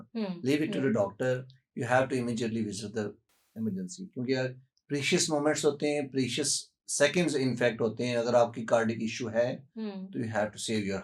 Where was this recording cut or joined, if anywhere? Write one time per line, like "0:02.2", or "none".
none